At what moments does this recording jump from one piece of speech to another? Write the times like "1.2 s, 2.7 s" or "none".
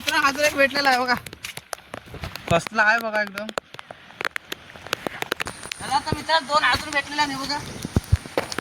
5.4 s